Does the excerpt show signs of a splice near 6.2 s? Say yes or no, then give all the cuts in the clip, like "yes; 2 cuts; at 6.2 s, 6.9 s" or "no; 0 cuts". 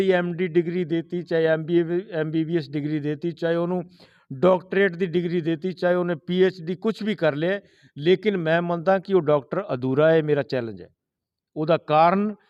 no; 0 cuts